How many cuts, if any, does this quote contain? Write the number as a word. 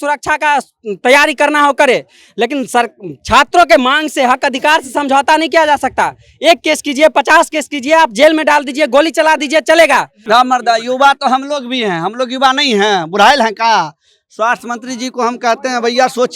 one